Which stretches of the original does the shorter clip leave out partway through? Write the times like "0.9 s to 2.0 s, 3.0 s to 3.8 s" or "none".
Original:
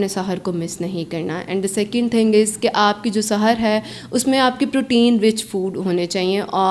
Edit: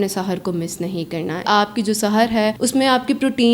1.4 s to 2.7 s, 3.8 s to 4.1 s